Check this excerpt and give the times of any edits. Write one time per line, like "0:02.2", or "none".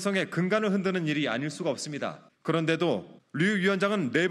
0:02.3
0:03.2

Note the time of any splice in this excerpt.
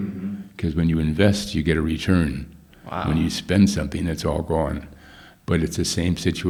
none

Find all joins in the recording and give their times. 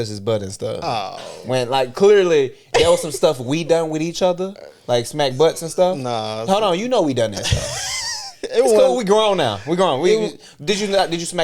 none

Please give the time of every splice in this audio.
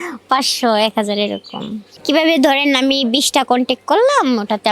none

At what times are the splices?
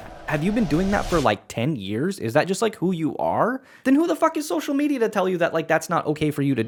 none

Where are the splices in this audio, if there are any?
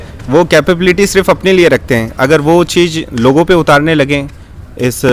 none

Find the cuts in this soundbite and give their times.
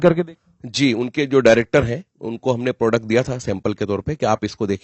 none

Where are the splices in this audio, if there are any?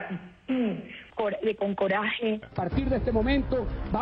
0:02.5

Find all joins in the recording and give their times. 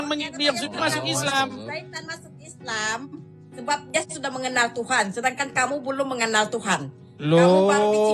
none

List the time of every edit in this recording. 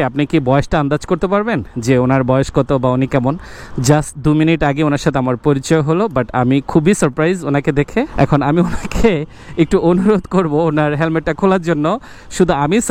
none

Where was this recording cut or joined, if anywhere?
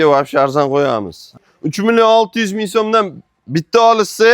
0:01.4

